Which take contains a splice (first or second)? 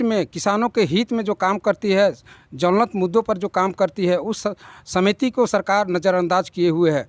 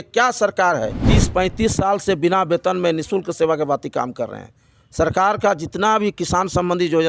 second